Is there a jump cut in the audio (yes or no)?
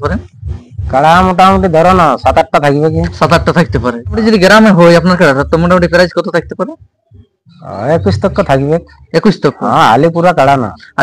yes